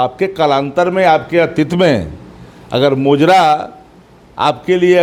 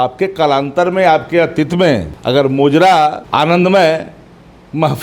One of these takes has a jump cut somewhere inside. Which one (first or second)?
second